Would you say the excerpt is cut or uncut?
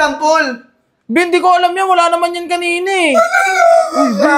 uncut